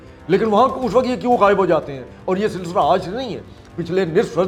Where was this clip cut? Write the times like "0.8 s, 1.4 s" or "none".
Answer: none